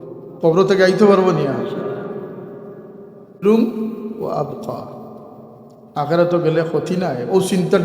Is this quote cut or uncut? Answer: cut